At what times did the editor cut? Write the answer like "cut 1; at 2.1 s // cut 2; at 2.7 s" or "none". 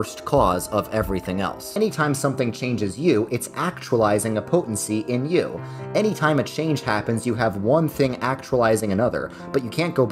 cut 1; at 1.8 s